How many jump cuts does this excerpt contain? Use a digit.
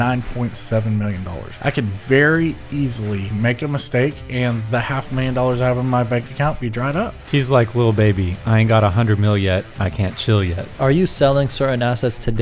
4